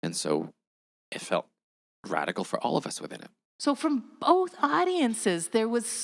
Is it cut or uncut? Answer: cut